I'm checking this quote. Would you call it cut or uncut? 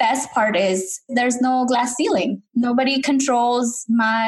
cut